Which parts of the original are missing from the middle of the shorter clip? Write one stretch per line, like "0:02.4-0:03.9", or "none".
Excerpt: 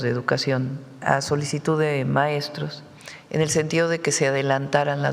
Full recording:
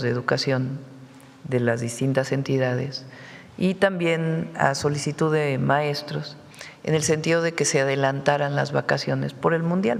0:00.9-0:04.5

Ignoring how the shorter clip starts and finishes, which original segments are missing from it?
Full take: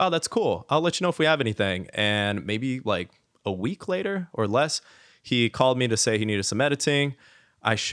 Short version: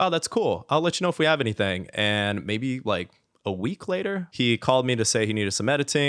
0:04.3-0:05.2

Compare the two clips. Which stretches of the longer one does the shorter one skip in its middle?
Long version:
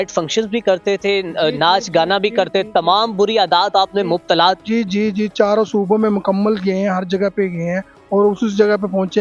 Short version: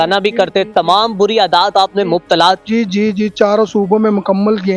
none

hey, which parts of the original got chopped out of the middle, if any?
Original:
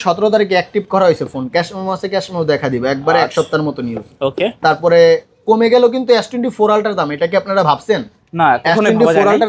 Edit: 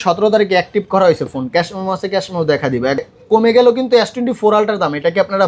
0:03.0-0:05.2

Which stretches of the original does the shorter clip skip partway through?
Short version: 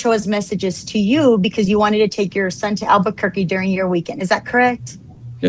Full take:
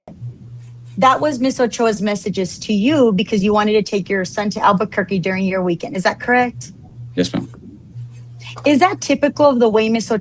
none

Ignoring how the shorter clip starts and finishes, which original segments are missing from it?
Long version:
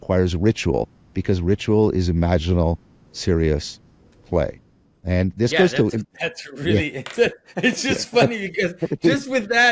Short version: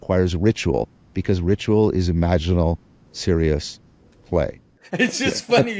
0:04.8-0:07.4

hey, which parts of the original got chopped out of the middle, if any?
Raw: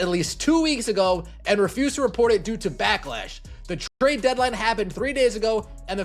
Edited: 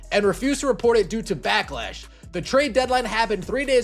0:03.7-0:03.9

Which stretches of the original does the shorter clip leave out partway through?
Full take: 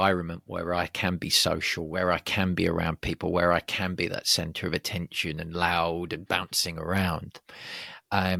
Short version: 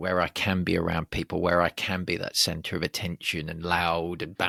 none

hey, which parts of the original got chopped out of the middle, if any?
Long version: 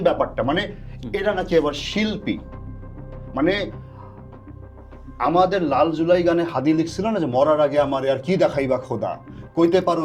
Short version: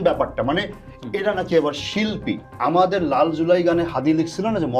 0:02.5-0:05.1

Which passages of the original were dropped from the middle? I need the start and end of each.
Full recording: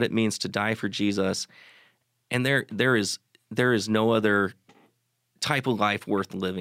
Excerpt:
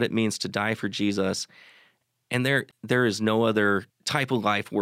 0:02.7-0:03.4
0:04.6-0:05.3

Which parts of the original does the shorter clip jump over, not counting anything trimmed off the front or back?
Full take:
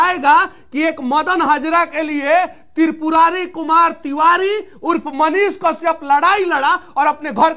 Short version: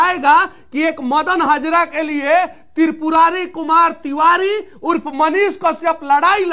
none

